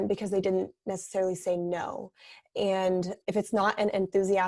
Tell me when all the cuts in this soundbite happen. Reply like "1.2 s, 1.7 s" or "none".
3.2 s